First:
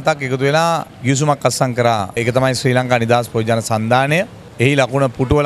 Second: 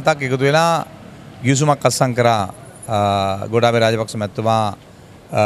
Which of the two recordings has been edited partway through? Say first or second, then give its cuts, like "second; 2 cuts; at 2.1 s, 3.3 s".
first; 3 cuts; at 0.9 s, 2.2 s, 4.4 s